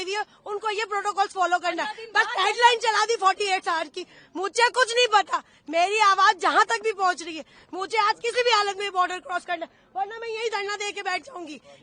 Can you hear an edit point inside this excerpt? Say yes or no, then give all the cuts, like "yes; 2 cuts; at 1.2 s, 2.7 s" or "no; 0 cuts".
no; 0 cuts